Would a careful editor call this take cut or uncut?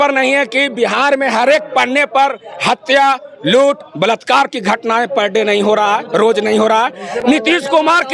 uncut